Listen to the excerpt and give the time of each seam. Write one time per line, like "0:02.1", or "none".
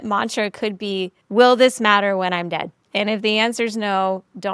0:01.2
0:02.8